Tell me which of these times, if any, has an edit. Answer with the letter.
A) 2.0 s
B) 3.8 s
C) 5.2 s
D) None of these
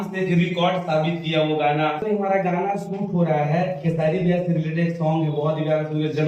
A